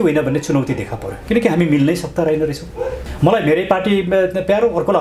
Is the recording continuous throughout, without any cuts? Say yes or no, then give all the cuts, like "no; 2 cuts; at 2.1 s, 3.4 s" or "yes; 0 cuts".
no; 1 cut; at 3.0 s